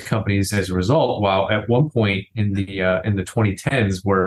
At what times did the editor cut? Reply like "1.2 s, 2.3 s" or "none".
none